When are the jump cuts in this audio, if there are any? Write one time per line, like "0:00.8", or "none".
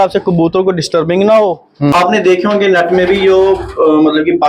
0:01.9

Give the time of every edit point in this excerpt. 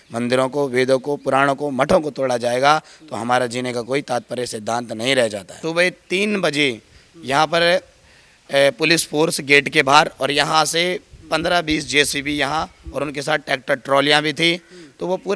0:05.5

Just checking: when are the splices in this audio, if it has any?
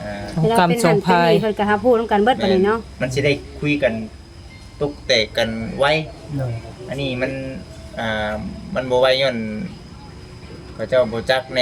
none

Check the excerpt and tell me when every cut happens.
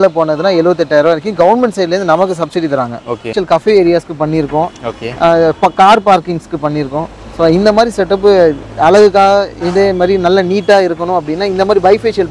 0:03.4

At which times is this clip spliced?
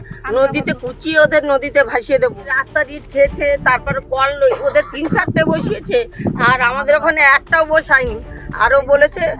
0:02.5

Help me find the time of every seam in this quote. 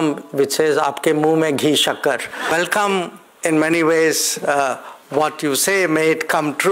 0:02.5

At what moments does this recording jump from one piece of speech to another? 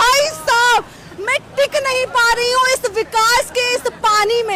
none

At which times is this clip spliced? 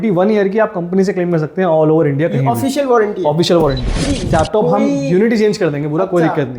0:04.2

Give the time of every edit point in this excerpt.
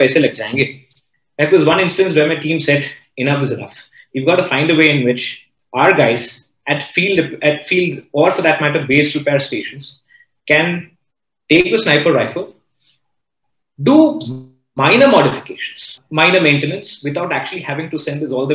0:16.0

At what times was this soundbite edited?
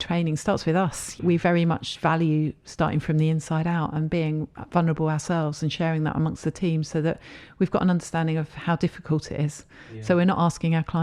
0:01.2

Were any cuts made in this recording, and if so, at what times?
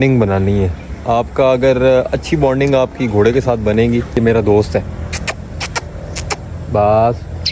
0:04.2

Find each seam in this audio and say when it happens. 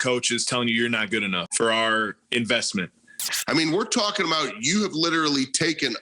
0:01.5
0:03.3

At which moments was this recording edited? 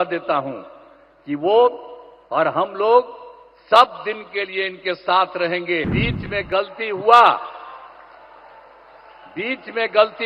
0:06.0

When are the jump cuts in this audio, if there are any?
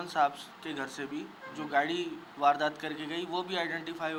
none

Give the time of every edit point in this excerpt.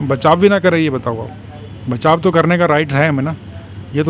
none

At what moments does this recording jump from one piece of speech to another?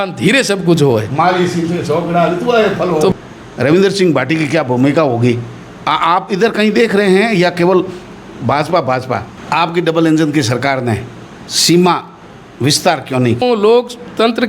0:03.1
0:09.3
0:13.4

